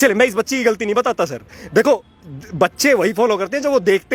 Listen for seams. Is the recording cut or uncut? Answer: uncut